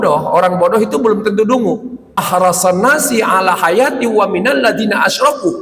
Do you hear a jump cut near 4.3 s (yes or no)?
no